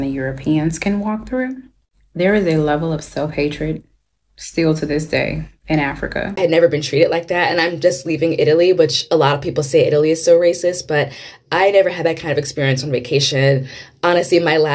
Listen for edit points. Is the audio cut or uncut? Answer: cut